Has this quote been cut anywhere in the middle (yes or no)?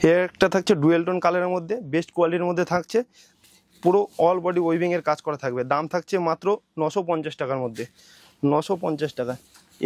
no